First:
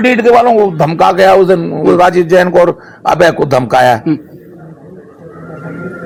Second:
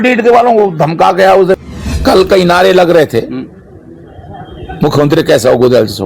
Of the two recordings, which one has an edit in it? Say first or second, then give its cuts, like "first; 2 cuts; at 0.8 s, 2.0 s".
second; 1 cut; at 1.6 s